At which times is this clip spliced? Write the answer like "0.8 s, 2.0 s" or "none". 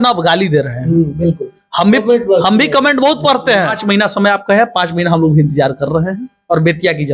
3.8 s